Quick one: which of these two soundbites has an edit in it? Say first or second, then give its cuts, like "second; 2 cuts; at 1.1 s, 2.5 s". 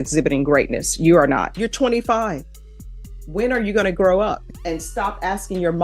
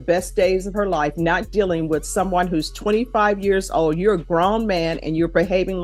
first; 2 cuts; at 1.5 s, 4.5 s